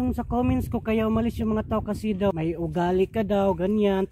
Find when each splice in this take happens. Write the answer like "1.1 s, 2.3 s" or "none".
2.3 s